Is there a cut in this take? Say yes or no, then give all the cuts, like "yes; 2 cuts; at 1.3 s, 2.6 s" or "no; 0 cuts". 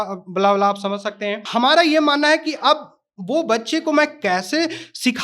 yes; 1 cut; at 1.4 s